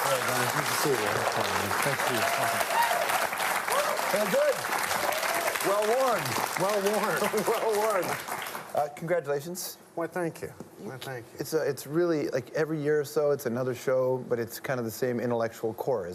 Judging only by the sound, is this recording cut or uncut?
uncut